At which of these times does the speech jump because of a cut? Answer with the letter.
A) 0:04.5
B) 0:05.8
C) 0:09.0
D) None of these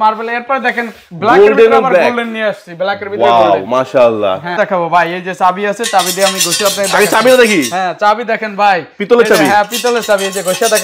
A